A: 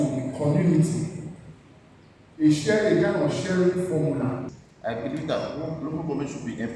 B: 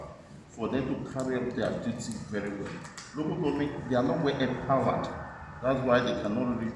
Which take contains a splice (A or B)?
A